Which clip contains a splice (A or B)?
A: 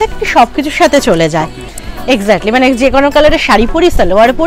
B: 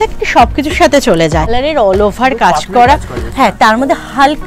B